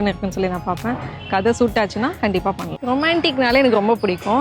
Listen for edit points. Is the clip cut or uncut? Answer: cut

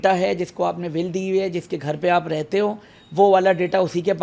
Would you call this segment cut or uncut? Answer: uncut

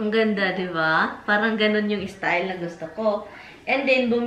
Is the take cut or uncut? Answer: uncut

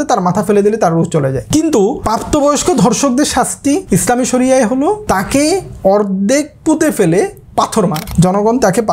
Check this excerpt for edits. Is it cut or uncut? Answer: cut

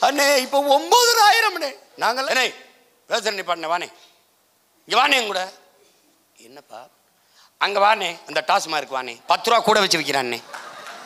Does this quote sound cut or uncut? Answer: cut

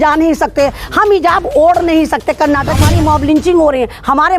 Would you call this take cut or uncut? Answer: cut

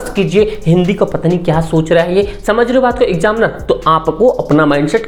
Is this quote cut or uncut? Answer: uncut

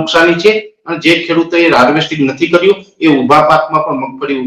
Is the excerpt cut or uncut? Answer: uncut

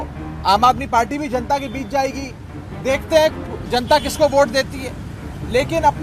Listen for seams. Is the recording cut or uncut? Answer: uncut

